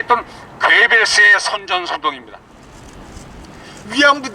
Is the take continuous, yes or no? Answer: no